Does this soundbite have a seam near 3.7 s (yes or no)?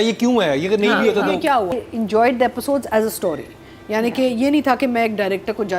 no